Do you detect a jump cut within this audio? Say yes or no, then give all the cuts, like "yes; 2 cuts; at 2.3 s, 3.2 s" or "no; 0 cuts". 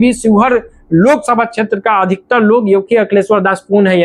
no; 0 cuts